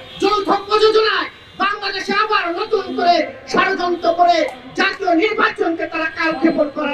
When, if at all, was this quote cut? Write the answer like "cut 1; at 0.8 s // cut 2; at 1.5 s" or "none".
none